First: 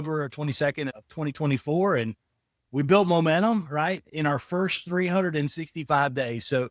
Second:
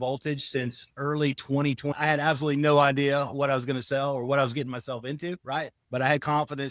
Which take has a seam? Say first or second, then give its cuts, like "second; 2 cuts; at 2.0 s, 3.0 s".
second; 2 cuts; at 1.9 s, 5.8 s